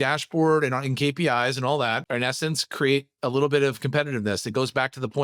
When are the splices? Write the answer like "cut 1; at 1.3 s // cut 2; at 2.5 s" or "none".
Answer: none